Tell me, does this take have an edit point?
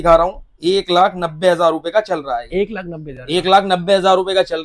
no; 0 cuts

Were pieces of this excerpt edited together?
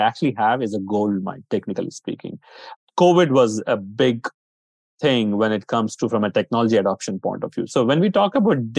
no; 0 cuts

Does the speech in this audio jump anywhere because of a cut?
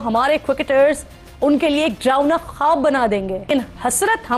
yes; 1 cut; at 3.5 s

